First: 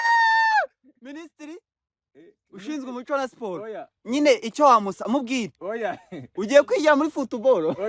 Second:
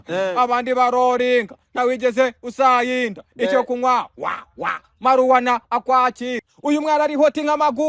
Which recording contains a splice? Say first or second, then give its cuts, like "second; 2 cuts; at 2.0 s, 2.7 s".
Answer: second; 1 cut; at 6.5 s